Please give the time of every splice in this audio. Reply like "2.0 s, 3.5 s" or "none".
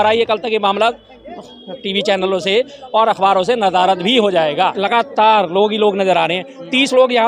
4.8 s